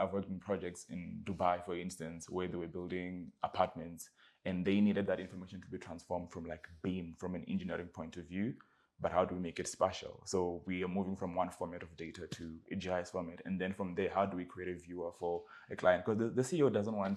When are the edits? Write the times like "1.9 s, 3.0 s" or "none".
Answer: none